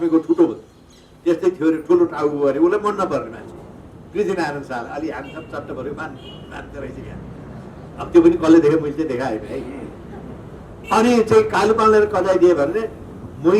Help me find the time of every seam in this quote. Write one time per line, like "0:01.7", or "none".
none